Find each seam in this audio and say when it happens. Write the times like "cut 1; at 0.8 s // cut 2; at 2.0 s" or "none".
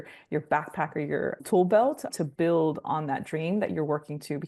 cut 1; at 1.4 s // cut 2; at 2.1 s